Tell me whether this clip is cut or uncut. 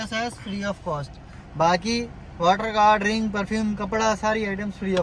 uncut